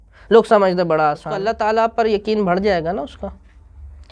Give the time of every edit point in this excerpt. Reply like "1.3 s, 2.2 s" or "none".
1.3 s